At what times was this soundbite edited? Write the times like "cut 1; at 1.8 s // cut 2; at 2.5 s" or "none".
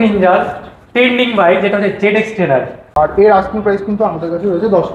cut 1; at 2.8 s